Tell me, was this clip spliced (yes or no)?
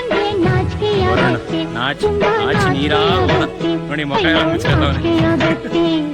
no